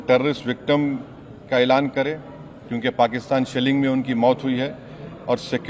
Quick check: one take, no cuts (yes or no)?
yes